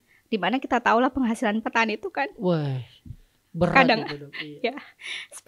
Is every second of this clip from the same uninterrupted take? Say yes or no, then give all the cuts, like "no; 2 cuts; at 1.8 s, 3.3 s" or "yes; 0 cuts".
yes; 0 cuts